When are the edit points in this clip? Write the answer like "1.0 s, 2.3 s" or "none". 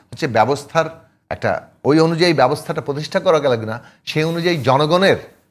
none